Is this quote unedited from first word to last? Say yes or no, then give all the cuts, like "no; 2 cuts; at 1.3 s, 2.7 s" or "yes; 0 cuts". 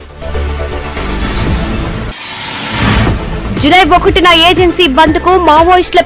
no; 2 cuts; at 1.9 s, 2.9 s